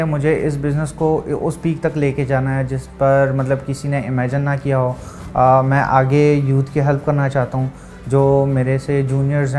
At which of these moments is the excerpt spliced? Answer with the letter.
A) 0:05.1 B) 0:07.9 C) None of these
C